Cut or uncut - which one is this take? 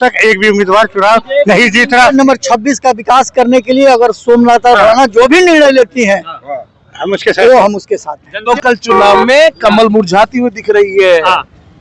cut